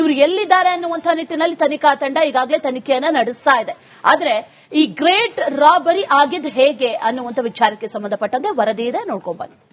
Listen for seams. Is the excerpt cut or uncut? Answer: uncut